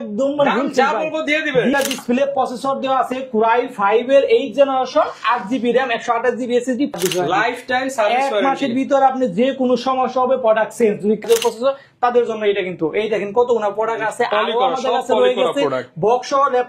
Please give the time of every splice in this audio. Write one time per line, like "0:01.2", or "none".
0:01.7
0:07.0
0:11.2

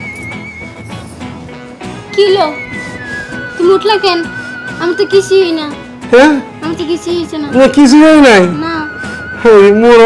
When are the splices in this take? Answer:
none

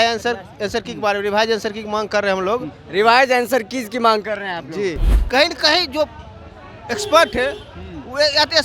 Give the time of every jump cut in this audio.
0:05.1

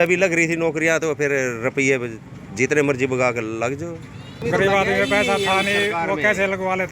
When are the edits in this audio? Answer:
0:04.4

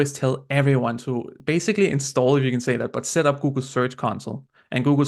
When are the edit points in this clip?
0:01.3

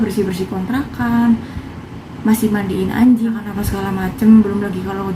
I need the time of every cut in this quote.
0:03.4

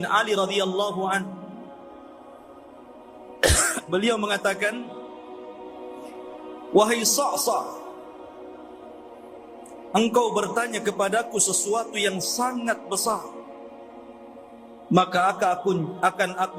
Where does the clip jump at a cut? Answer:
0:01.8
0:03.3
0:05.1
0:06.7
0:07.8
0:09.9
0:13.4
0:14.9

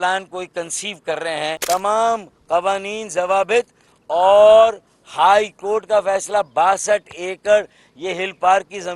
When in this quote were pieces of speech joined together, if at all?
0:01.6

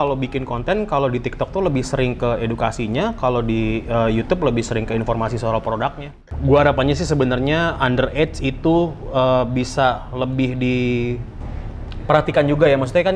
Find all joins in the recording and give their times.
0:06.2

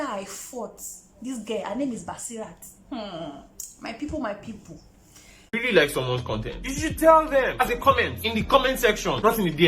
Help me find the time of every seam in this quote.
0:05.3

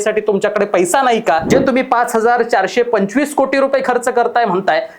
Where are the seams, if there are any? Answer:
0:01.4

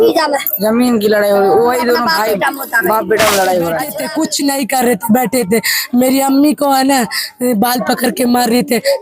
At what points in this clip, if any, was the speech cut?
0:04.0

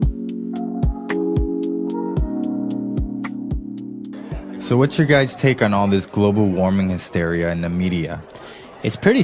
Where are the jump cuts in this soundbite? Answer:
0:04.6

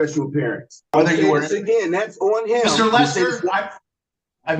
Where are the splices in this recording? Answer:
0:00.9

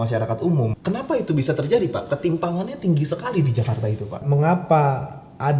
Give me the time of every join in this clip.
0:00.8
0:04.2

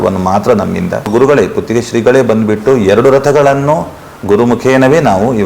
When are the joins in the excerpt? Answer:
0:01.1

